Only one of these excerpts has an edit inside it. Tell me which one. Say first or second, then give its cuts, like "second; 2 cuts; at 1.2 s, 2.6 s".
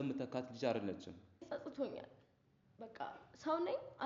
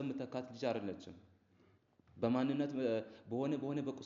first; 1 cut; at 1.5 s